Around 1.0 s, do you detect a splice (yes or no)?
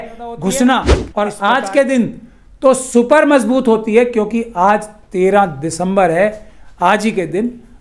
yes